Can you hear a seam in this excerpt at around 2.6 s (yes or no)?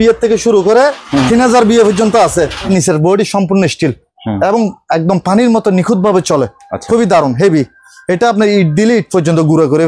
yes